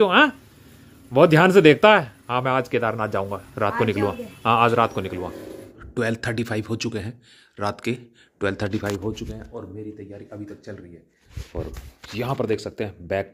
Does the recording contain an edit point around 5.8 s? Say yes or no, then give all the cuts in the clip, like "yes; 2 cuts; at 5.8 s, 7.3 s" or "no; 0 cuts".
yes; 1 cut; at 5.8 s